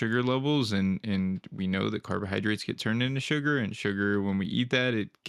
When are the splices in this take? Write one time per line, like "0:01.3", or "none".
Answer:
none